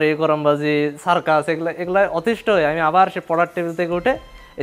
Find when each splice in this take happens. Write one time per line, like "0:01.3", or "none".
none